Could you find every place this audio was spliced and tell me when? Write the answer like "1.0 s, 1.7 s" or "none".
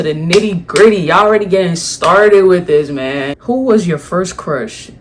3.3 s